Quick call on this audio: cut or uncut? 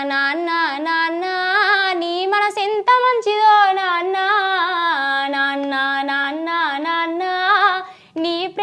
uncut